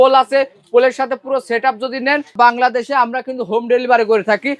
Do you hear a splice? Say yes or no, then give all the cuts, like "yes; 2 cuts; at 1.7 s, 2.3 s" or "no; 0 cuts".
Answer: yes; 1 cut; at 2.3 s